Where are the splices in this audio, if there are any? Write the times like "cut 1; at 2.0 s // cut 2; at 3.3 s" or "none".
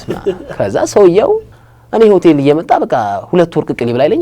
cut 1; at 1.5 s